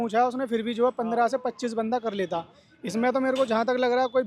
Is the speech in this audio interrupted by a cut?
no; 0 cuts

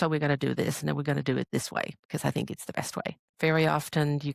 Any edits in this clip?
yes; 1 cut; at 3.2 s

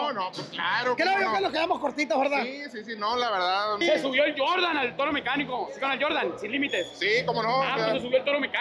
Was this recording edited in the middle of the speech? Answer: yes; 1 cut; at 3.8 s

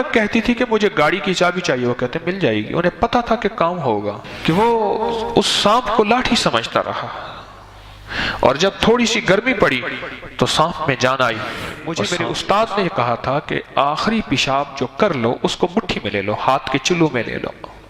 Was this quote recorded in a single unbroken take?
no; 2 cuts; at 4.3 s, 11.9 s

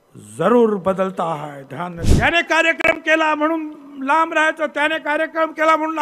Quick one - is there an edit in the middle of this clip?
yes; 1 cut; at 2.0 s

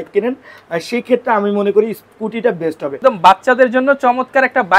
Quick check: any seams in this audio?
yes; 1 cut; at 2.9 s

